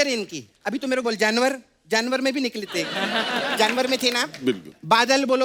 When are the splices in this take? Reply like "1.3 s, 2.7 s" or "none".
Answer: none